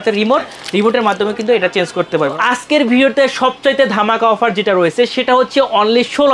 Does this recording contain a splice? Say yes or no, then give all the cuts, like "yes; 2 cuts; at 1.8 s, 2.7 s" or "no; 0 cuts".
yes; 1 cut; at 2.3 s